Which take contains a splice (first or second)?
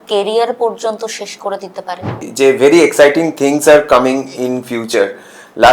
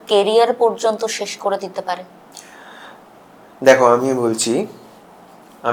first